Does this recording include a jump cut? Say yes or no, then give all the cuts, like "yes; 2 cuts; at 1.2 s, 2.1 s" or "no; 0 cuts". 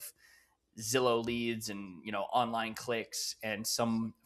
no; 0 cuts